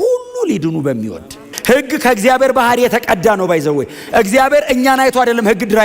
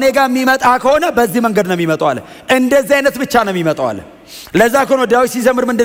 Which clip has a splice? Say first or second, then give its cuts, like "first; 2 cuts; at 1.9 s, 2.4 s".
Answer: first; 1 cut; at 1.5 s